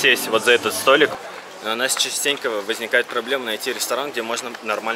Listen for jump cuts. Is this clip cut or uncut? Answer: cut